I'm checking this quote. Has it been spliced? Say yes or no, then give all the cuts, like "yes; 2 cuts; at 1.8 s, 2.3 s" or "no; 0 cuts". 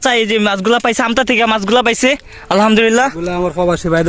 no; 0 cuts